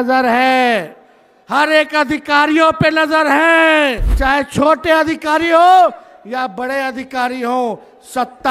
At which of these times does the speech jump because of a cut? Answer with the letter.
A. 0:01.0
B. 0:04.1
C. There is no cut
B